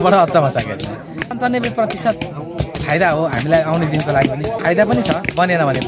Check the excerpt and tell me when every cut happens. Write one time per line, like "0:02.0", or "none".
0:01.3
0:04.6